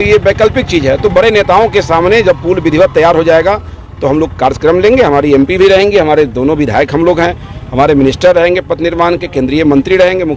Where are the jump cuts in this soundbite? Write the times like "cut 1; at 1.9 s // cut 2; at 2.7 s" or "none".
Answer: none